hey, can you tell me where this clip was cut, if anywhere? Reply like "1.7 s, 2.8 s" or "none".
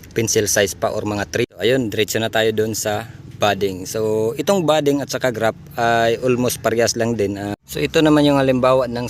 1.4 s, 7.5 s